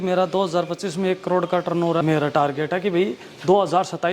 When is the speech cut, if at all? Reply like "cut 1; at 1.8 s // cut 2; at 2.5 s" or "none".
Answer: cut 1; at 2.0 s